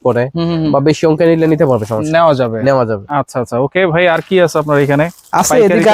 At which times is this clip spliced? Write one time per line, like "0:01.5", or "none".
none